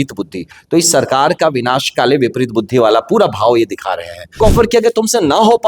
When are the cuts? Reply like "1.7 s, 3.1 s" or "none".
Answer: 4.4 s